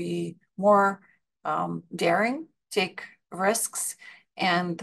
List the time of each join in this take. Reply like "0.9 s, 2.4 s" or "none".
none